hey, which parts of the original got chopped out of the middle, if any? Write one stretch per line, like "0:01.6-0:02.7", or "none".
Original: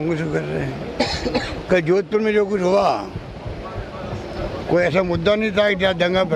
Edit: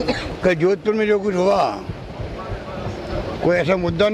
none